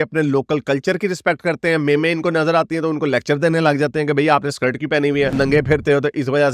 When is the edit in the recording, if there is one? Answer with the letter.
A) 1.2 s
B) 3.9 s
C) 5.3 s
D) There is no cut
C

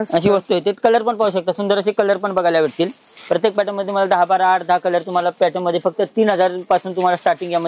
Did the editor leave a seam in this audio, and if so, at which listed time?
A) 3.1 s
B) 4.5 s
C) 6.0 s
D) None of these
D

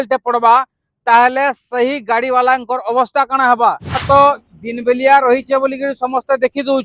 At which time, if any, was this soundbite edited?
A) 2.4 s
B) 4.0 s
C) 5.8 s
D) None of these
B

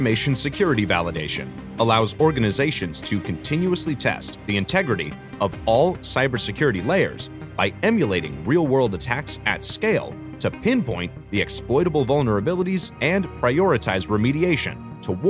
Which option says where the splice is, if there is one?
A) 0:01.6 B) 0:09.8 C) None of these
C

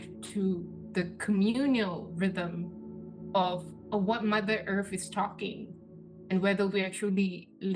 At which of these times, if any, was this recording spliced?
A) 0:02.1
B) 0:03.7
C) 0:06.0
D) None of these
B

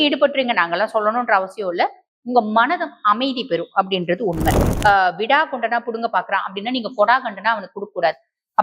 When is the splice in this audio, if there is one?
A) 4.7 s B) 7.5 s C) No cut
A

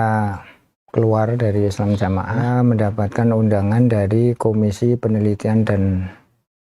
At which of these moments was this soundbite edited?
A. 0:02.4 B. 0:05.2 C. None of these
A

